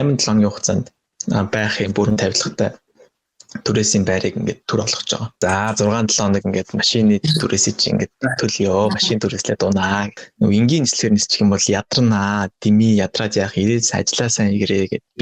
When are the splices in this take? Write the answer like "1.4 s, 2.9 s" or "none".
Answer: 5.3 s, 10.2 s